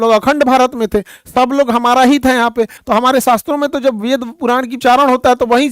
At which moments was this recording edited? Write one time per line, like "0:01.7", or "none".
0:02.8
0:04.7